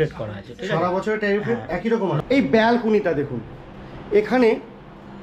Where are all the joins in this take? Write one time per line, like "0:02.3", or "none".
0:02.2

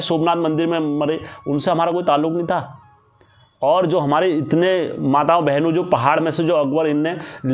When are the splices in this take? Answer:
none

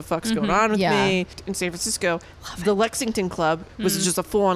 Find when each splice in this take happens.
0:01.4
0:03.7

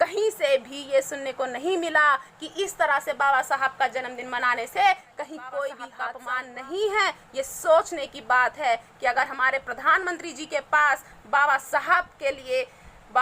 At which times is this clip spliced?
0:05.9

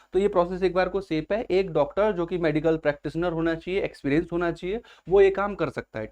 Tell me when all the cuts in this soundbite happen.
none

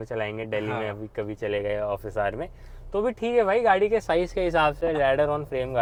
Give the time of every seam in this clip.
none

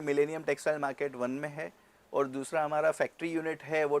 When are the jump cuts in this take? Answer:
none

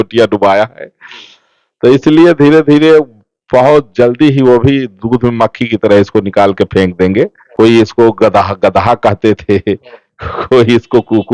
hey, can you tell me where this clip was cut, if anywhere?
0:07.4

